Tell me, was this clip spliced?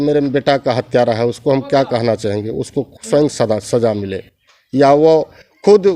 no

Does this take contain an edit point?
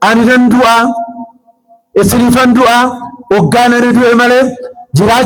no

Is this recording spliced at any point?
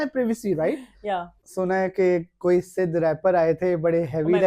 yes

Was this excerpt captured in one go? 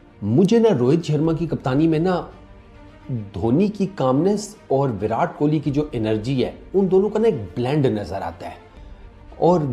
yes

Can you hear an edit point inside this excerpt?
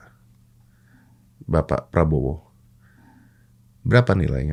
no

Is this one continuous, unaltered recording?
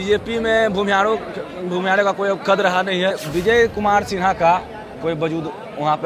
no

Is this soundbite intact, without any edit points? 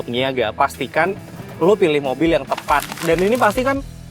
no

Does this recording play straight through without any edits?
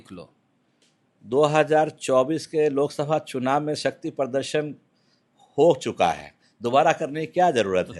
yes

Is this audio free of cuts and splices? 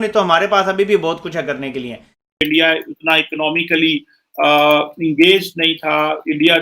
no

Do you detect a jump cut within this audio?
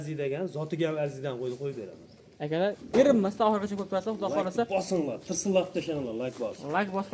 no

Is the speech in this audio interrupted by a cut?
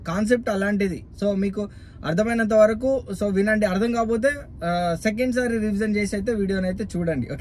no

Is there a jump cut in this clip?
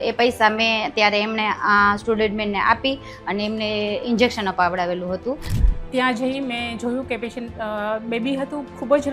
yes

